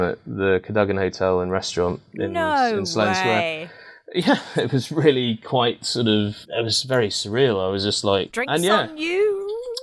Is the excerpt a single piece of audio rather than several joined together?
no; 2 cuts; at 6.4 s, 8.4 s

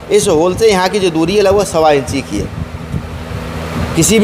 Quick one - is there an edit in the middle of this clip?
no; 0 cuts

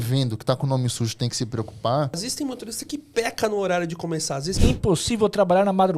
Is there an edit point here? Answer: yes; 2 cuts; at 2.3 s, 4.5 s

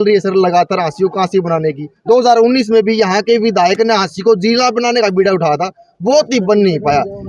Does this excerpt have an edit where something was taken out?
no; 0 cuts

